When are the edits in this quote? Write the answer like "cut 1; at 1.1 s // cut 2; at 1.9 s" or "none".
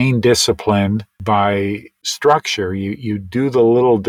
cut 1; at 1.1 s // cut 2; at 2.0 s